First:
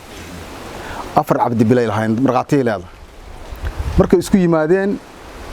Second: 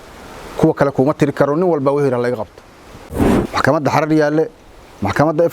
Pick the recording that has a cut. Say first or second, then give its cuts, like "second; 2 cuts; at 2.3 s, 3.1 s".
second; 1 cut; at 3.3 s